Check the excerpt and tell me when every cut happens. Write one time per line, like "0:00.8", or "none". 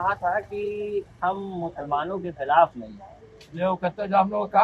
none